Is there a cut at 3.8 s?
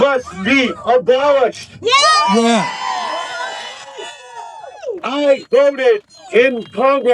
no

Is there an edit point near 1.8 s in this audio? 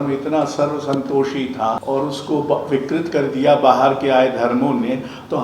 yes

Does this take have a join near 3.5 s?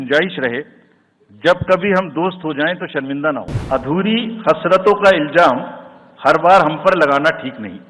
yes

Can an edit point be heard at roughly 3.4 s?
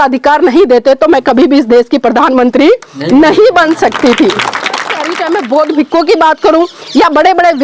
no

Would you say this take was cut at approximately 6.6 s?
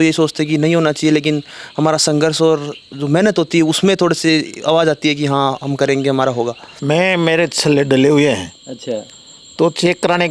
yes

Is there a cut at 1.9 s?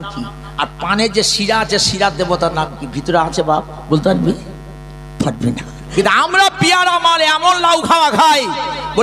no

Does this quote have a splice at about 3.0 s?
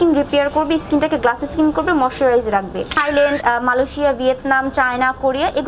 yes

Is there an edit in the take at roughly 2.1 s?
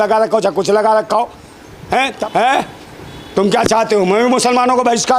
yes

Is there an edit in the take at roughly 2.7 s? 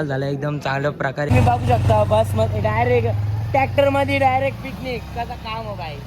no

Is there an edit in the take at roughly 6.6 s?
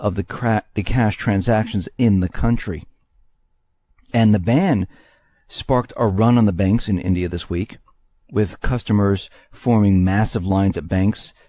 no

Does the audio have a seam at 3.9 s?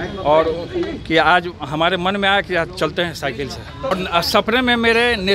yes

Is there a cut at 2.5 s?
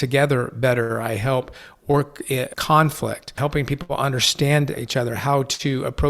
yes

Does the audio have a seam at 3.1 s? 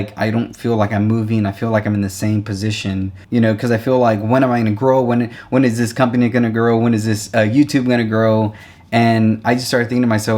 yes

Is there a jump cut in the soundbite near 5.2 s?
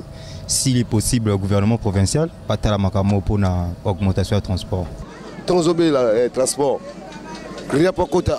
yes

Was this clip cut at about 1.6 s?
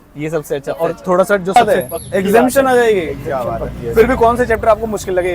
yes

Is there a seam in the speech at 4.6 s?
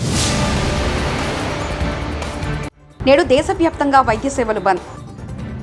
no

